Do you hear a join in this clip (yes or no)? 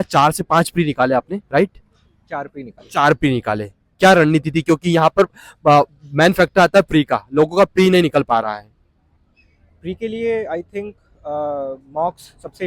no